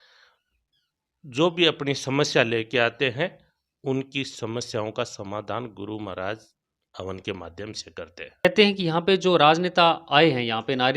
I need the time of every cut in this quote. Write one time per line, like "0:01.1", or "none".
0:08.4